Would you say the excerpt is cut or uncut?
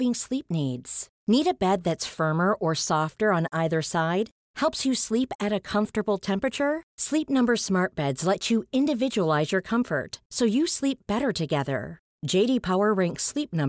uncut